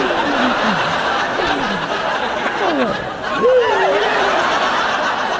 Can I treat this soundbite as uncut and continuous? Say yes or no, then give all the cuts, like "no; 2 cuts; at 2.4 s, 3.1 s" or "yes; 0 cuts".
yes; 0 cuts